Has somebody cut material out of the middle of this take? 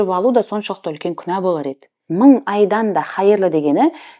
yes; 1 cut; at 2.0 s

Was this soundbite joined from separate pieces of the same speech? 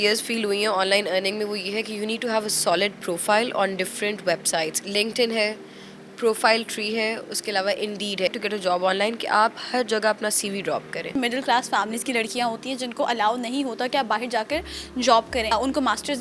yes; 4 cuts; at 4.8 s, 8.3 s, 11.2 s, 15.5 s

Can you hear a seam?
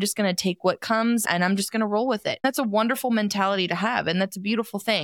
yes; 2 cuts; at 1.2 s, 2.4 s

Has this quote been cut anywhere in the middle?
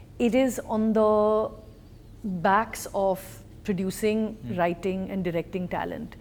no; 0 cuts

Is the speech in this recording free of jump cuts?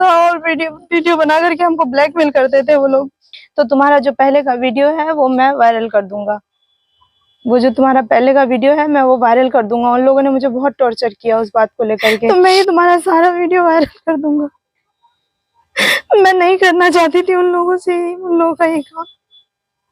no; 2 cuts; at 3.4 s, 12.3 s

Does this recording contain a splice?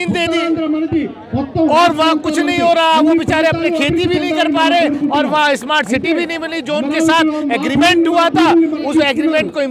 no; 0 cuts

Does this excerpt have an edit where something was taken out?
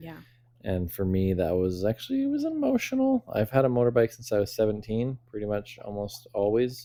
no; 0 cuts

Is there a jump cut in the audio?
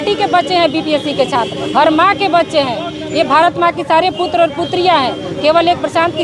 no; 0 cuts

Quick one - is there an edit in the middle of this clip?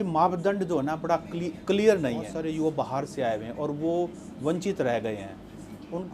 yes; 1 cut; at 2.3 s

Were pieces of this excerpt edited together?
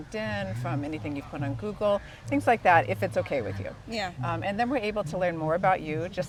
no; 0 cuts

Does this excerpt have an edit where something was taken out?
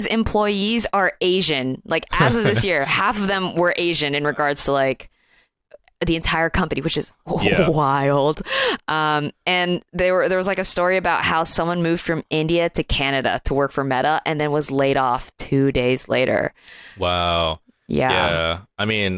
no; 0 cuts

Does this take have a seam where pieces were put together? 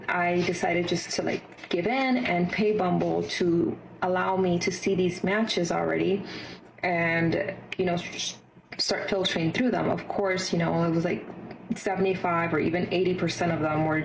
no; 0 cuts

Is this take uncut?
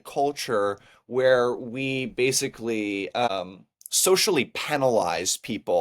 no; 1 cut; at 3.3 s

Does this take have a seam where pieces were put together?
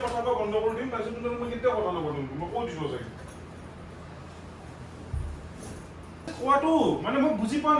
yes; 1 cut; at 6.3 s

